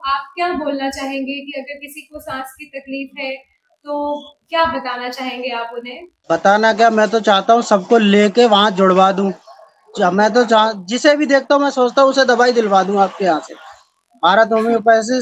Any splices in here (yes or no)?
no